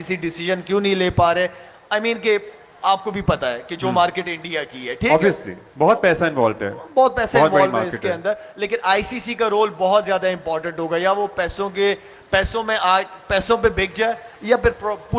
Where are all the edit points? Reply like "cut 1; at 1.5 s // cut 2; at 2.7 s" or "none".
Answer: none